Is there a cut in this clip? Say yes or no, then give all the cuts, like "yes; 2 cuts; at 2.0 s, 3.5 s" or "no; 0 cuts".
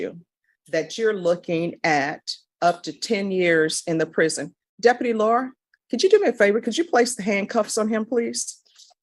no; 0 cuts